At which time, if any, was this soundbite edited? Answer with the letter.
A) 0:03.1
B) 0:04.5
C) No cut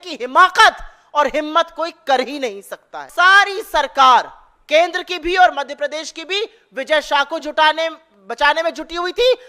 A